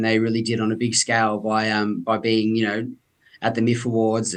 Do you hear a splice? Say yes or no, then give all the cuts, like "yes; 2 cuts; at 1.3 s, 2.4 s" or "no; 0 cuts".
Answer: no; 0 cuts